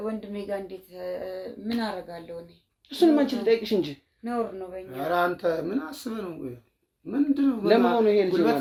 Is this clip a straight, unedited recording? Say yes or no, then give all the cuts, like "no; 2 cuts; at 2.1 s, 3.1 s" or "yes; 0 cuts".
yes; 0 cuts